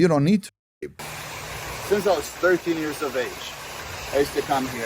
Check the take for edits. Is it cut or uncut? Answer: cut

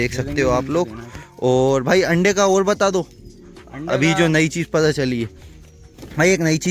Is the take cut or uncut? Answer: uncut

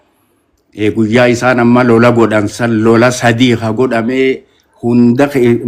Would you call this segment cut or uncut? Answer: uncut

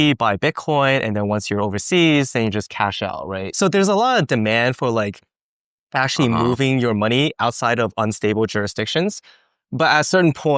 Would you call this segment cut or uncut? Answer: cut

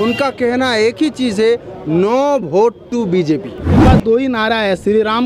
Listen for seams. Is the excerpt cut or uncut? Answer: cut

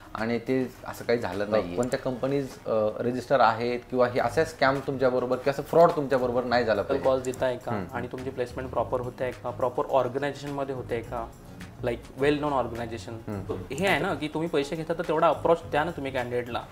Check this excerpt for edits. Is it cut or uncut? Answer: cut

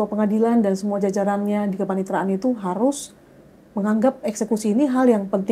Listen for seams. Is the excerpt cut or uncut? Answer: uncut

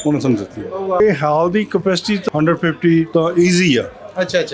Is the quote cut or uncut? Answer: cut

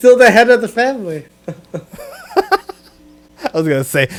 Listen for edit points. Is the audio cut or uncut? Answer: uncut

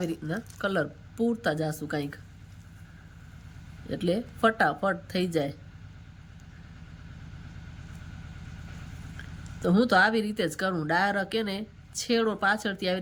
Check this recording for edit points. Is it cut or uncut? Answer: uncut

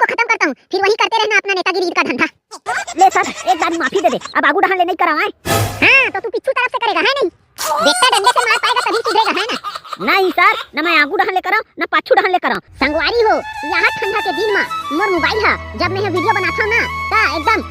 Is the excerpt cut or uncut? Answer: cut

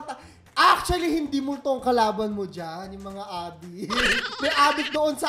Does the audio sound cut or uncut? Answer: cut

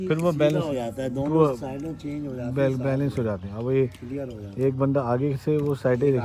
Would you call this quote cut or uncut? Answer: uncut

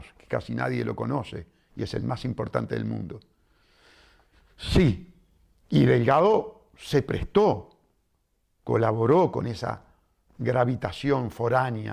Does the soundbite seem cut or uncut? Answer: uncut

